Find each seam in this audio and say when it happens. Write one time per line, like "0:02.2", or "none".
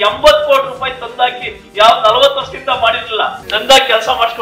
0:03.4